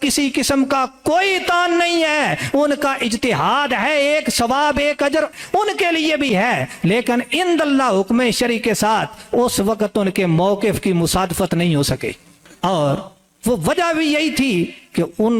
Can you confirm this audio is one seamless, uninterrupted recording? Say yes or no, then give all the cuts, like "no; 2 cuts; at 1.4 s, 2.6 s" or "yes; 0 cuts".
yes; 0 cuts